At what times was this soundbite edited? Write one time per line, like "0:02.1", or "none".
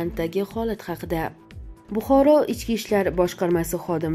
0:01.4